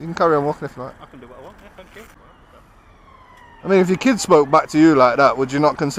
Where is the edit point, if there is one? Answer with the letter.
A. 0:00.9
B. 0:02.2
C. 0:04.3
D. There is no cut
B